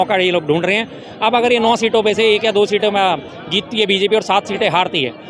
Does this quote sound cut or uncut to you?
uncut